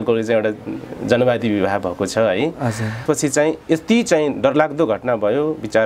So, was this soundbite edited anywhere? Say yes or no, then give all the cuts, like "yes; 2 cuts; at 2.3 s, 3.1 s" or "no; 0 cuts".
yes; 1 cut; at 3.0 s